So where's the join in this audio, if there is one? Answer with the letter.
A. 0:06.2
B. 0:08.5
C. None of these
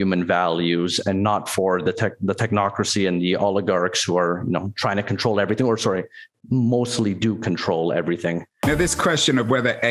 B